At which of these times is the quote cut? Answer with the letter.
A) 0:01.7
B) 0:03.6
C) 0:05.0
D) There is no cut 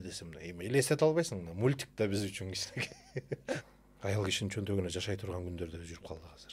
B